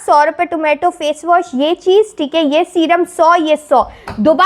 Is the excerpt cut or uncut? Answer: uncut